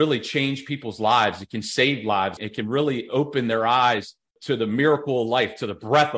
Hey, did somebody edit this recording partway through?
yes; 2 cuts; at 2.4 s, 4.3 s

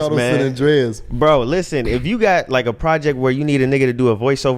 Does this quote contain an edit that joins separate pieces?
no; 0 cuts

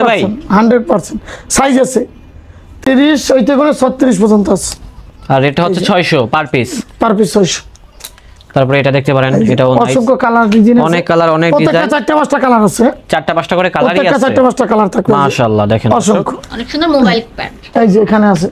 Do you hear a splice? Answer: no; 0 cuts

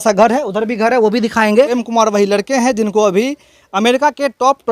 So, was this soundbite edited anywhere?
yes; 1 cut; at 1.8 s

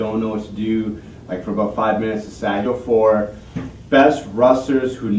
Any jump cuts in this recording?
no; 0 cuts

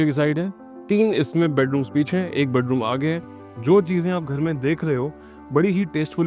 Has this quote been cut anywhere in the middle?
yes; 1 cut; at 3.4 s

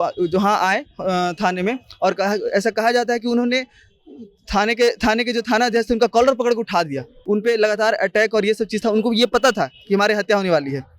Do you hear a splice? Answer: yes; 1 cut; at 7.1 s

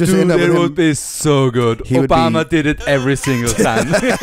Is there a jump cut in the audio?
no; 0 cuts

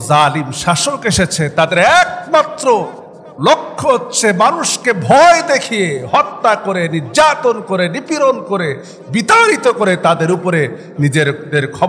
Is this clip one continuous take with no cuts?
yes; 0 cuts

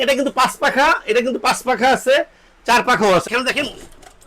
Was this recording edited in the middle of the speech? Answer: yes; 1 cut; at 3.3 s

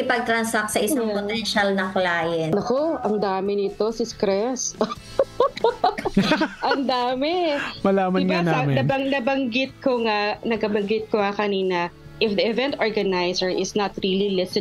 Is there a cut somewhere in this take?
yes; 1 cut; at 2.5 s

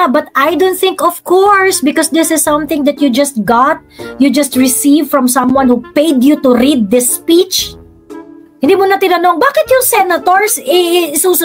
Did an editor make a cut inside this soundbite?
yes; 1 cut; at 8.4 s

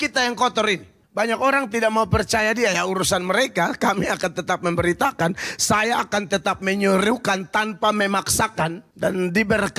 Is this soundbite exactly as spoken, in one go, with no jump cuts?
no; 2 cuts; at 1.0 s, 8.9 s

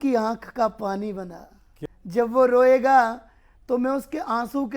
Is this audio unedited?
no; 1 cut; at 1.6 s

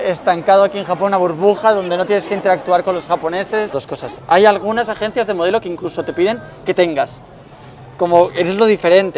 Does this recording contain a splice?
yes; 1 cut; at 3.8 s

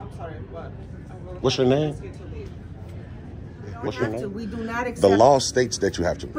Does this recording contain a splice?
yes; 1 cut; at 4.0 s

